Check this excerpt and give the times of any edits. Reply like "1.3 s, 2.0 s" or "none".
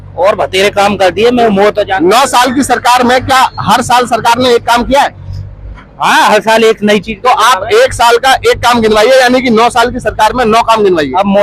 none